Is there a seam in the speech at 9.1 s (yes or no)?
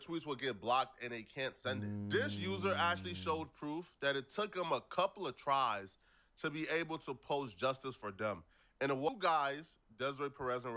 yes